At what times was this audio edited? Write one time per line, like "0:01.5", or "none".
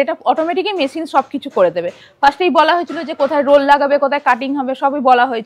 none